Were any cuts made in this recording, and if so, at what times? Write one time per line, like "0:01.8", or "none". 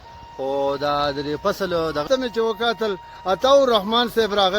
0:02.0